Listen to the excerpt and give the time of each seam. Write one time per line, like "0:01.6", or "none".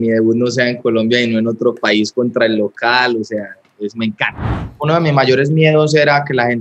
0:04.4

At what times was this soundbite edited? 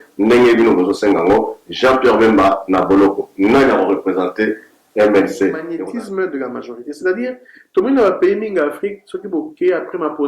0:05.7

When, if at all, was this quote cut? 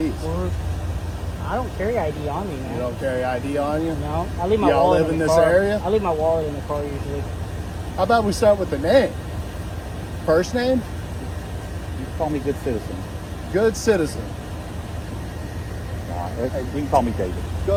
none

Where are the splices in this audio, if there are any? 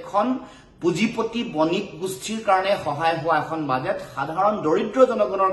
none

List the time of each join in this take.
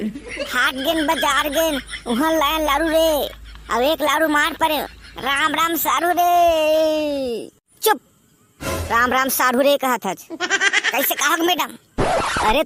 none

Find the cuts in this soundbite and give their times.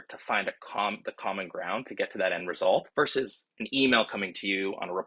0:02.9

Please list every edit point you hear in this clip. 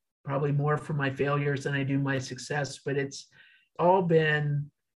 0:03.7

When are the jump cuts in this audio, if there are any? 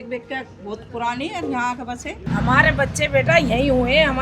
0:02.2

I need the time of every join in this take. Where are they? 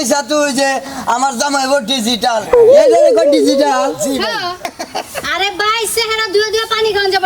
0:04.7

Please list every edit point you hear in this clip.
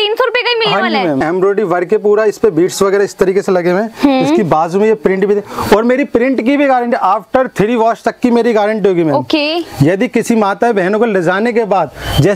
0:01.2

